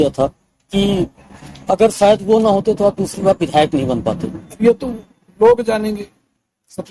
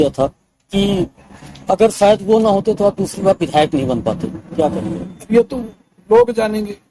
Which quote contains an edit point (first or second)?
first